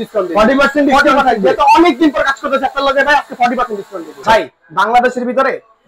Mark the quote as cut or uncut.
cut